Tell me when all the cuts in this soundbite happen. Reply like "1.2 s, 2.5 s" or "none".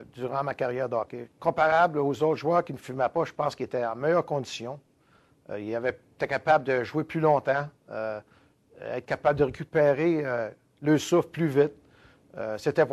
1.2 s